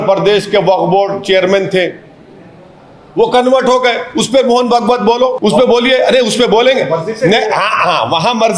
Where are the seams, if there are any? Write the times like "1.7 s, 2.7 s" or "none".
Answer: 5.4 s